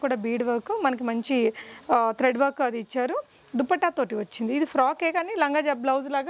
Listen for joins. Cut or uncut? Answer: uncut